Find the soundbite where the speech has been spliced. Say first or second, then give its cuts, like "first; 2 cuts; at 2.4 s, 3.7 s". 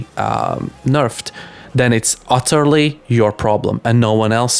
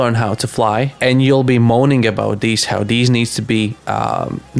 second; 1 cut; at 0.9 s